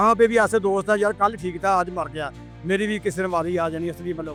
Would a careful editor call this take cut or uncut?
uncut